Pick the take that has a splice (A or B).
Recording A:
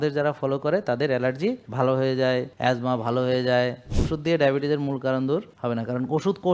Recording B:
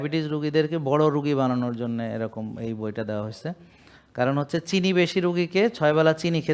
A